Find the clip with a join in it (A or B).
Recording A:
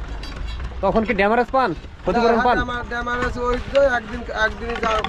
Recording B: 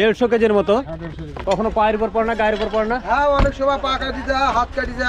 B